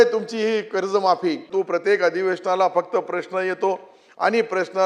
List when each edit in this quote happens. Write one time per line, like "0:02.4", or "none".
0:01.5